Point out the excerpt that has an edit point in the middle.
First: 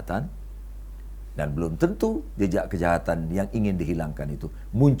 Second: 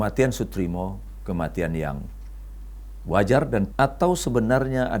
second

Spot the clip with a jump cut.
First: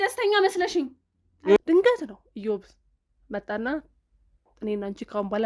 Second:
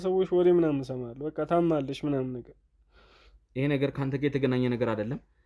first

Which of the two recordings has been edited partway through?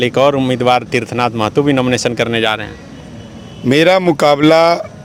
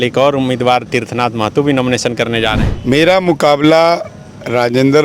second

